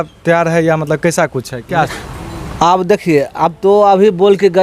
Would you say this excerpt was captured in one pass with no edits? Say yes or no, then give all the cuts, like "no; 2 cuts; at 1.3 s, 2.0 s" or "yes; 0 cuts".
no; 1 cut; at 2.0 s